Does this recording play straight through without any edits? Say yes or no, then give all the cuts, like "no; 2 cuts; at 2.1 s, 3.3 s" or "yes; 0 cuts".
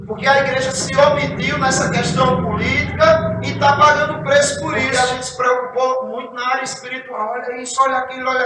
no; 1 cut; at 4.8 s